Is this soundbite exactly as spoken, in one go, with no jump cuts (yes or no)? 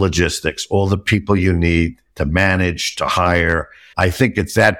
no